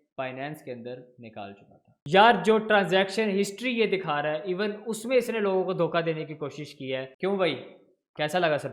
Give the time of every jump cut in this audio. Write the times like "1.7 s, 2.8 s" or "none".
2.0 s, 7.1 s